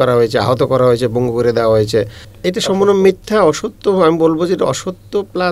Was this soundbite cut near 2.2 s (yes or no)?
yes